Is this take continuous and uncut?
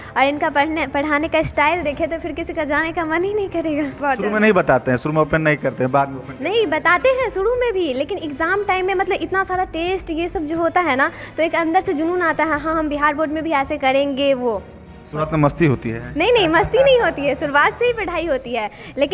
no; 1 cut; at 3.9 s

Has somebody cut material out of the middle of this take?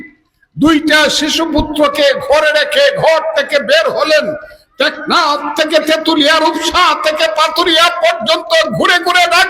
no; 0 cuts

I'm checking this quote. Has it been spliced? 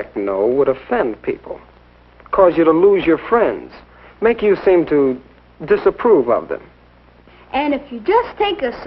yes; 1 cut; at 6.8 s

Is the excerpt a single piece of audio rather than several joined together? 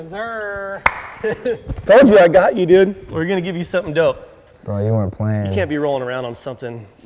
yes; 0 cuts

